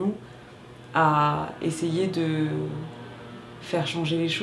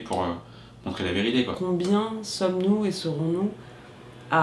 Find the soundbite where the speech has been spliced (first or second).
second